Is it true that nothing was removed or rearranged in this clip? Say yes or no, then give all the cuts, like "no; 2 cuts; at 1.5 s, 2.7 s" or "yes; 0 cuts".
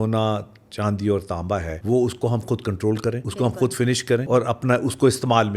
no; 3 cuts; at 1.7 s, 3.2 s, 4.2 s